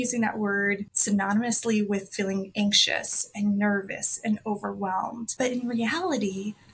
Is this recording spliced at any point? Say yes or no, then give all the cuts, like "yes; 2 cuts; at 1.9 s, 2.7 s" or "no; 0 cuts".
yes; 1 cut; at 0.9 s